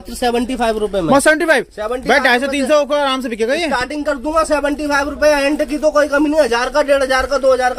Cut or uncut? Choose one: uncut